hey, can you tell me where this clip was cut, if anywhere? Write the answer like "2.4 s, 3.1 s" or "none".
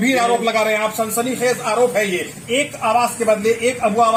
none